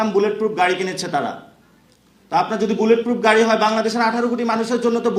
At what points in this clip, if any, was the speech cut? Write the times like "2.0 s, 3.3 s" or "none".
none